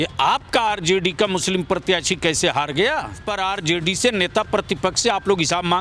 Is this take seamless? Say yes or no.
no